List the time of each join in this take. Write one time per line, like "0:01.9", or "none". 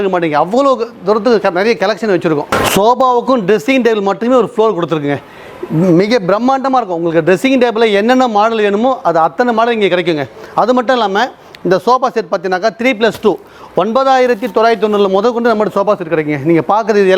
0:02.5